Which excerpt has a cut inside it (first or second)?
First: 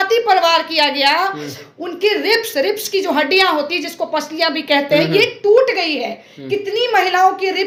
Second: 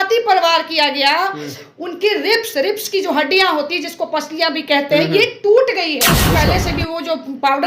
second